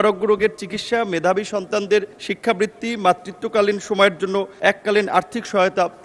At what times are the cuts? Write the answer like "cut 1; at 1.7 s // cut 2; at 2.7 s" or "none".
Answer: cut 1; at 2.2 s // cut 2; at 4.5 s